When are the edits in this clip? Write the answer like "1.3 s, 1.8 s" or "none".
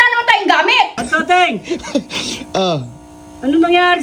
1.0 s